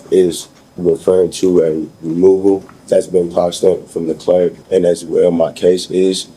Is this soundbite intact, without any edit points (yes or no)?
no